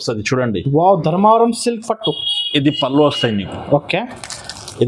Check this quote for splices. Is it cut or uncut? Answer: uncut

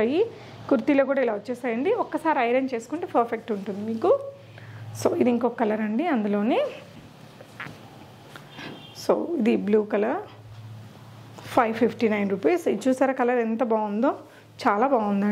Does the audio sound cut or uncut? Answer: uncut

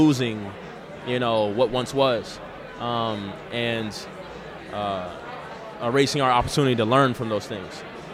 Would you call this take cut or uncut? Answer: uncut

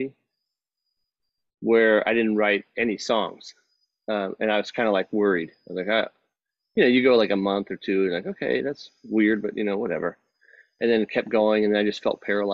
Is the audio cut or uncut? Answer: uncut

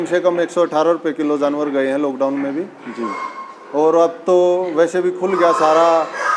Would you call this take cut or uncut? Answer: uncut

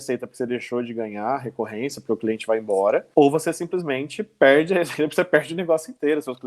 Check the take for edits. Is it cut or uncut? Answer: cut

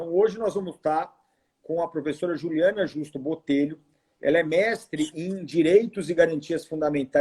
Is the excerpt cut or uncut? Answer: uncut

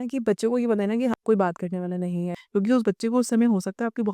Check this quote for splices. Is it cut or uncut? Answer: cut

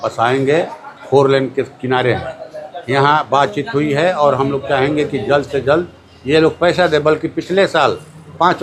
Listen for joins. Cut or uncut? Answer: uncut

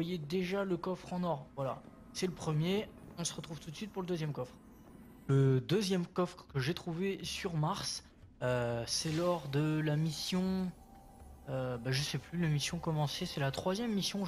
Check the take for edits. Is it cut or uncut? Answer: cut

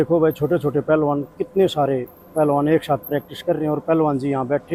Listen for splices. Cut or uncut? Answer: uncut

